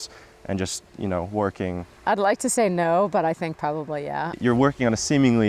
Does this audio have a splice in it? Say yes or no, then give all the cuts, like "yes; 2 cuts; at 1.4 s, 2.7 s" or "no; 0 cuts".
yes; 2 cuts; at 1.9 s, 4.2 s